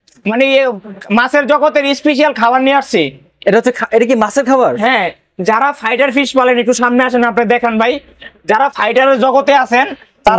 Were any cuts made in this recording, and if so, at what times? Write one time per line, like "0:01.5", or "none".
none

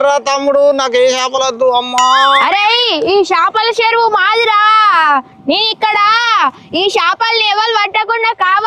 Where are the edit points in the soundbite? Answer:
0:02.4

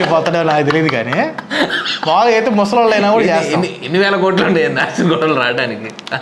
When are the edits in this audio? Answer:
none

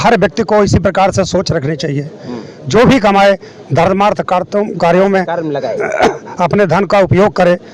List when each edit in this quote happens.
none

